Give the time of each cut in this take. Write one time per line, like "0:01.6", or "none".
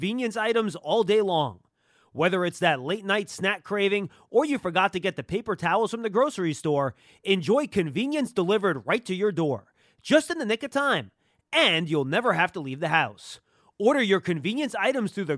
none